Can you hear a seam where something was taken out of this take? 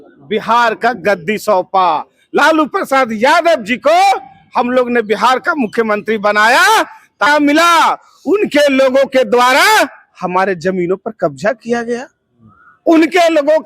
yes; 1 cut; at 7.3 s

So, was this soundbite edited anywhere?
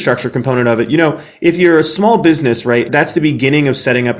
yes; 1 cut; at 2.9 s

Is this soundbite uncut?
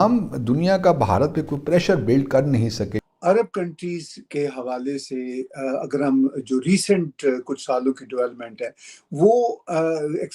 no; 1 cut; at 3.0 s

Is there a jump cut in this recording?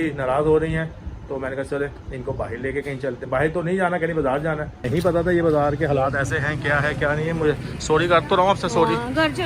yes; 1 cut; at 4.9 s

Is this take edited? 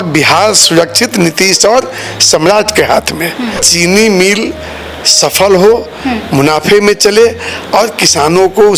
yes; 1 cut; at 3.7 s

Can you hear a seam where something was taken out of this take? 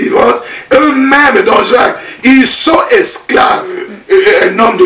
yes; 1 cut; at 3.9 s

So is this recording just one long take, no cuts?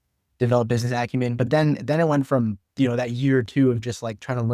yes; 0 cuts

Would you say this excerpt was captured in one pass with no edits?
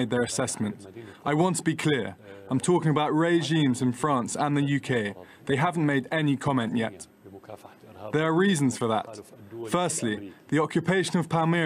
no; 1 cut; at 4.3 s

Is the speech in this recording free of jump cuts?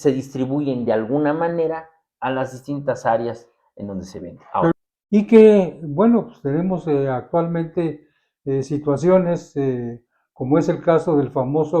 no; 1 cut; at 4.8 s

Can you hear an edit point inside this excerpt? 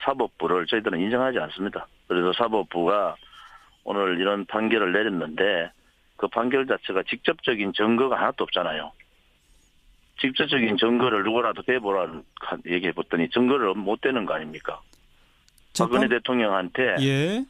yes; 1 cut; at 16.1 s

